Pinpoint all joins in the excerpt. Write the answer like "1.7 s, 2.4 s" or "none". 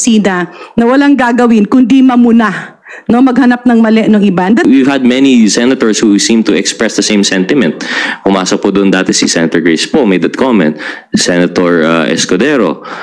4.6 s